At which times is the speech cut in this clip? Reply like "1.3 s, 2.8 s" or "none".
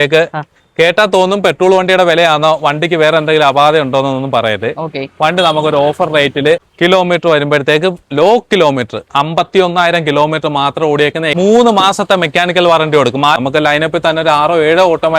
6.7 s, 11.4 s, 13.4 s